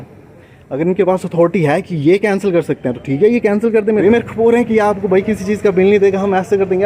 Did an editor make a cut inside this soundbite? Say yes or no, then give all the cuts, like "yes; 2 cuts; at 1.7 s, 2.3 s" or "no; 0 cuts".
yes; 1 cut; at 4.0 s